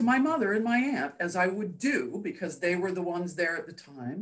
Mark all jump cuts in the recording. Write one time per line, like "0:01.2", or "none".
none